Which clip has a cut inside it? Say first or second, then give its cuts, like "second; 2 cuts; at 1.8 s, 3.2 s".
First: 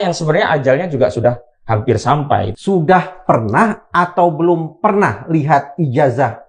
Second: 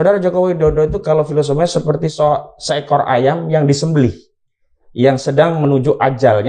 first; 1 cut; at 2.5 s